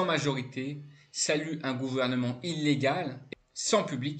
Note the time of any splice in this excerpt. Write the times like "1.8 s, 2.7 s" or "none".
3.2 s